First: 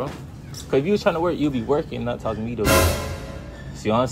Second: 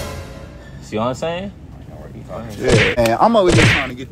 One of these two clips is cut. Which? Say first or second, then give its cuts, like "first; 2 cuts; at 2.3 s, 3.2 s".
second; 1 cut; at 3.0 s